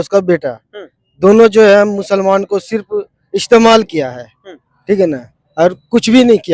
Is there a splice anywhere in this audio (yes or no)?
no